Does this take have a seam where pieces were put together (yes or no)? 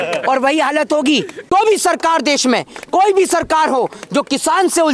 yes